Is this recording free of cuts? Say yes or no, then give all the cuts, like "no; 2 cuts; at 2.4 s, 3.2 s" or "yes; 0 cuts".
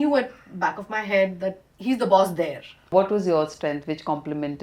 no; 2 cuts; at 1.7 s, 2.9 s